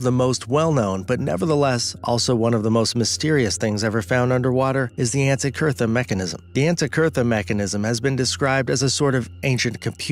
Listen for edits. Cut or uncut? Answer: uncut